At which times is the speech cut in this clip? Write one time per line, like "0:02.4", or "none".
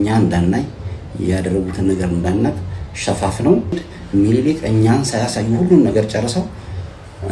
0:03.9